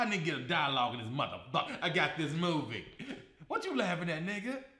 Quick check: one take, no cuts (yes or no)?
no